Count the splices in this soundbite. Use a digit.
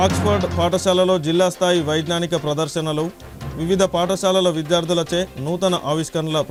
0